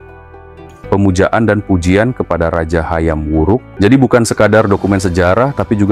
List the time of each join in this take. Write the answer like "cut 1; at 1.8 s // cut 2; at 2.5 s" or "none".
cut 1; at 3.7 s